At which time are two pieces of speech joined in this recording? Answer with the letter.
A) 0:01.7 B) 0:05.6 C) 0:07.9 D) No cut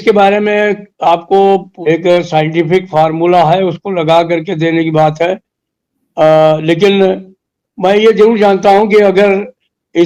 A